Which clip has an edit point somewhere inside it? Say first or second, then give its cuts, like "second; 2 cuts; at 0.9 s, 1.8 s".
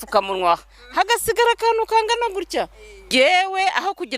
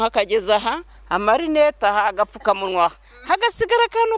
first; 1 cut; at 3.1 s